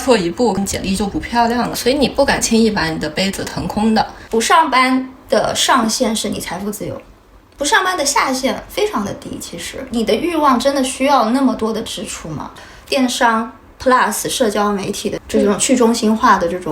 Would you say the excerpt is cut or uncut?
cut